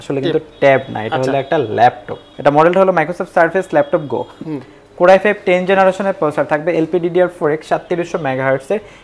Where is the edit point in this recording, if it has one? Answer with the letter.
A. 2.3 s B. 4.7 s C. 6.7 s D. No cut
A